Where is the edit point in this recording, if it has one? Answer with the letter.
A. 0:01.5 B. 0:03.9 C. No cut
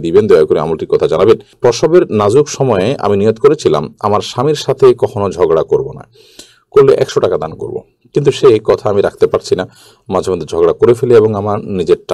A